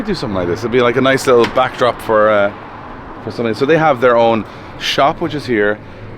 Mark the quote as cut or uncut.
uncut